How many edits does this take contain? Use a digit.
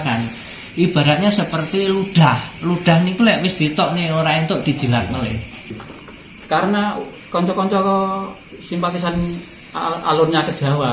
1